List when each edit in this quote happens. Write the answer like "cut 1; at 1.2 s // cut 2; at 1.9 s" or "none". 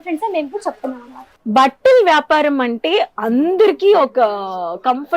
cut 1; at 1.4 s